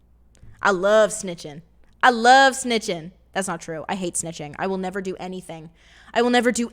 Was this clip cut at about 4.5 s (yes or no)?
no